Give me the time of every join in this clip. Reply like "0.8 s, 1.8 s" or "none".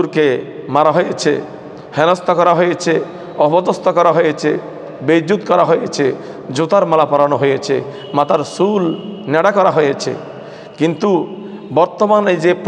none